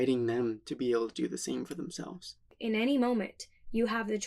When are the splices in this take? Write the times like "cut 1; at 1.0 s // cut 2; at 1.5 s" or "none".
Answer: cut 1; at 2.4 s